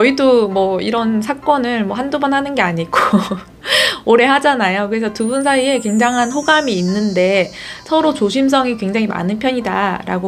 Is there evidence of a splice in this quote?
no; 0 cuts

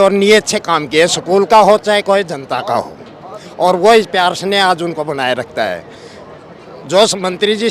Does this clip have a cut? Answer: no; 0 cuts

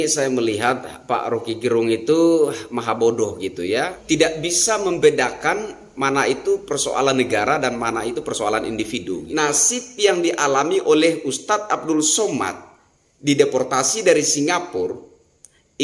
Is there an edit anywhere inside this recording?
yes; 2 cuts; at 3.9 s, 9.2 s

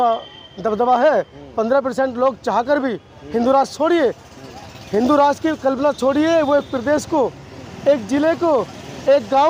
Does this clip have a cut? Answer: no; 0 cuts

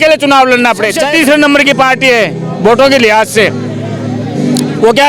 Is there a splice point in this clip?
yes; 1 cut; at 1.0 s

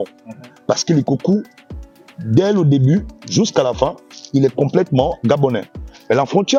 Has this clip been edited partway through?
no; 0 cuts

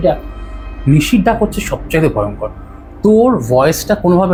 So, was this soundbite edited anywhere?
no; 0 cuts

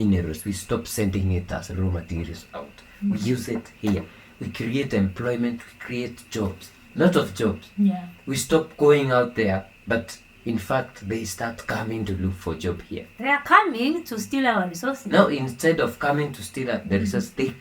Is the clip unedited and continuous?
yes; 0 cuts

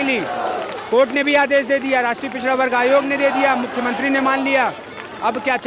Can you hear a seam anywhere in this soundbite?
no; 0 cuts

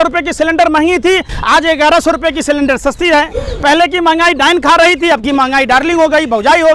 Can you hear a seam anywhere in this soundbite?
no; 0 cuts

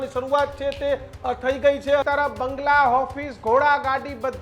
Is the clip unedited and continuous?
no; 1 cut; at 2.0 s

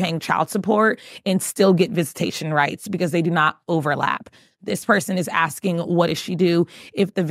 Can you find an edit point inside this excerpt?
no; 0 cuts

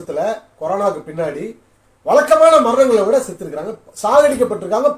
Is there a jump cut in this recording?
no; 0 cuts

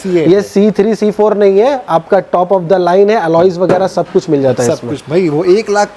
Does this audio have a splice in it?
no; 0 cuts

